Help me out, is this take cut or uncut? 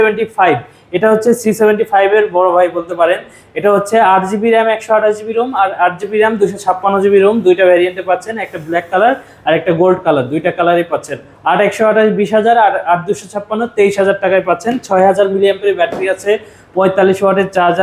uncut